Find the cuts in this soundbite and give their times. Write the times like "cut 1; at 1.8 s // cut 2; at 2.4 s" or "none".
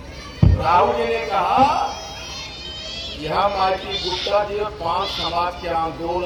none